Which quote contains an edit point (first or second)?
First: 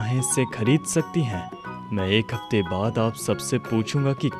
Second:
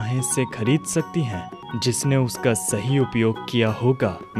second